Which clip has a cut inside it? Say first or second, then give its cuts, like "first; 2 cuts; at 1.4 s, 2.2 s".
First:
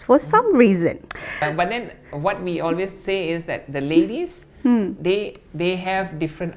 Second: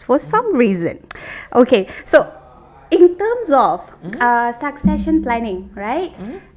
first; 1 cut; at 1.4 s